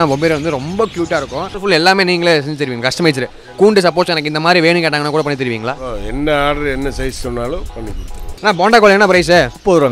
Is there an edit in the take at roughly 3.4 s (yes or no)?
no